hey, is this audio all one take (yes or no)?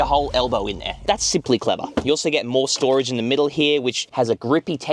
yes